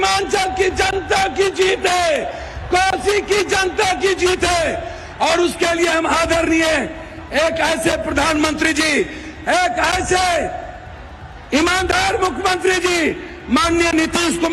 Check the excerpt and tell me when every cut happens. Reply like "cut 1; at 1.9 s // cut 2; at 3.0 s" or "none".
none